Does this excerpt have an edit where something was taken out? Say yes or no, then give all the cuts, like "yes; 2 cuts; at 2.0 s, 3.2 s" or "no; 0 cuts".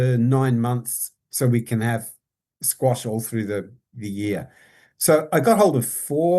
yes; 1 cut; at 1.2 s